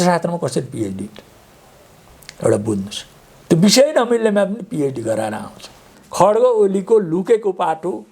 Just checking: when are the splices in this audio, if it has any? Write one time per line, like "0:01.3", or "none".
0:06.0

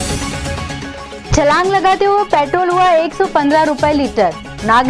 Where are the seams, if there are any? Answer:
0:01.2

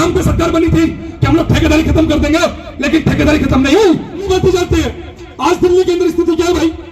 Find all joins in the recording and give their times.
0:04.3

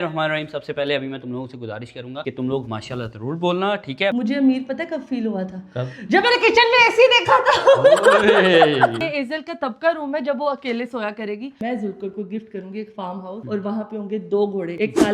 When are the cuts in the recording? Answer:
0:04.1
0:09.0
0:11.6

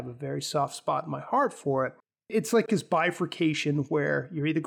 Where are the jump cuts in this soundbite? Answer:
0:02.2

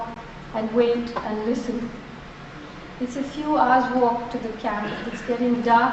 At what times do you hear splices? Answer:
0:05.0

